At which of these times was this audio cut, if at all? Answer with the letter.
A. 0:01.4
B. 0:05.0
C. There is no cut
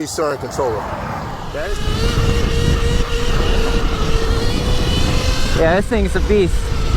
A